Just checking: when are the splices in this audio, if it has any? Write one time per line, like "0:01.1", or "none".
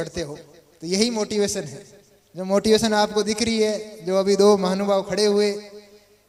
none